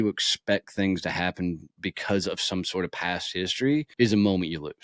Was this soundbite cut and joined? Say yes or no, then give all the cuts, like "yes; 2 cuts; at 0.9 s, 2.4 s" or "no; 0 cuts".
yes; 1 cut; at 3.9 s